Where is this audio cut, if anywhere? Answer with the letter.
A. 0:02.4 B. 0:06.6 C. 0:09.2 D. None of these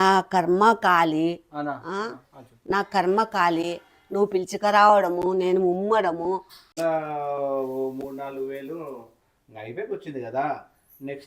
B